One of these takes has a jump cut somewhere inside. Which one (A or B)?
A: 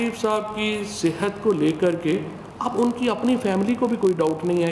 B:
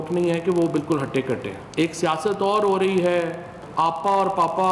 B